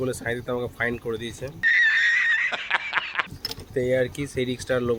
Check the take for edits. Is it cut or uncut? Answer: uncut